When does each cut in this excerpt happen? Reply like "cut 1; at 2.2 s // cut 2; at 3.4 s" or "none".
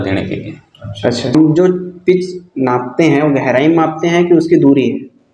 cut 1; at 1.3 s